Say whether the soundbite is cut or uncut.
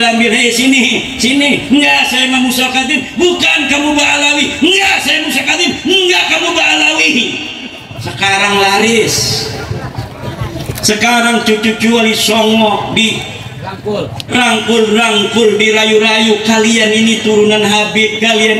uncut